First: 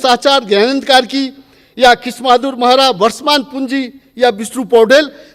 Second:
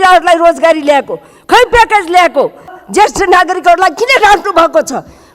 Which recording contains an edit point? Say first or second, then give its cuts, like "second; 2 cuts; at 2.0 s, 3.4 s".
second; 1 cut; at 2.8 s